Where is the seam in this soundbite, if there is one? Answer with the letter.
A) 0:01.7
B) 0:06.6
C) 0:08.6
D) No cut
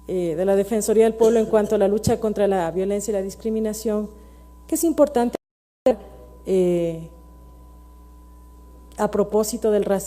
A